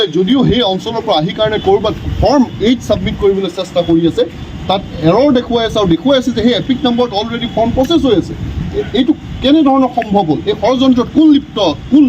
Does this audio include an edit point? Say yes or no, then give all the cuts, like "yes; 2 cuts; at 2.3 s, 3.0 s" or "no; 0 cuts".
no; 0 cuts